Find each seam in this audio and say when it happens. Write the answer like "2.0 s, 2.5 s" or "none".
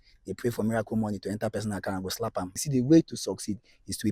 2.6 s